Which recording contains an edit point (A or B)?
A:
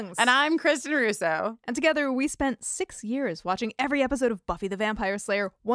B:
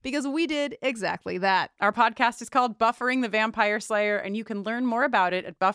B